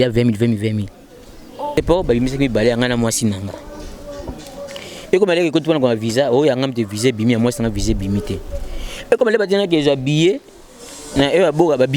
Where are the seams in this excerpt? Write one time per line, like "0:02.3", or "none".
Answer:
0:01.7